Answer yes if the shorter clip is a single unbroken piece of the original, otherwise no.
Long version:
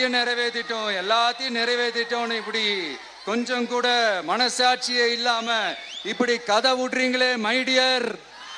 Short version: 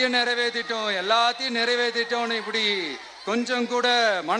yes